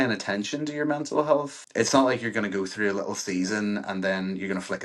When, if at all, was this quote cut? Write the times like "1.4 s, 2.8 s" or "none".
1.6 s